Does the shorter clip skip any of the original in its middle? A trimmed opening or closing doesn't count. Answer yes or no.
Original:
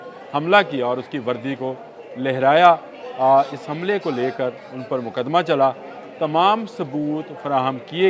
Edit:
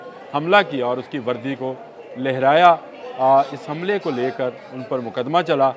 no